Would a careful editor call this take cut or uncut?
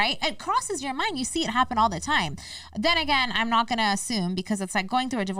uncut